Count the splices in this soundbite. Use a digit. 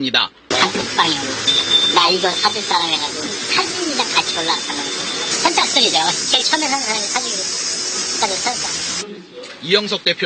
0